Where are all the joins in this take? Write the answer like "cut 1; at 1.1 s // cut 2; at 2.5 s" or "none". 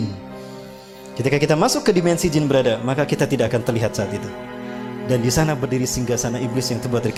none